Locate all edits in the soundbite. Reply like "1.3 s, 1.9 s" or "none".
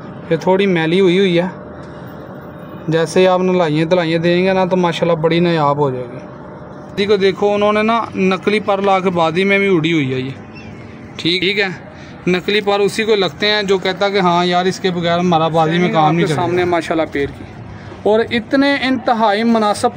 6.9 s, 11.4 s, 16.3 s